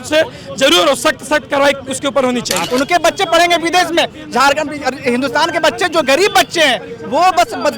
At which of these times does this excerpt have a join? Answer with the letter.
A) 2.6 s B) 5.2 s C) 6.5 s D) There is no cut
A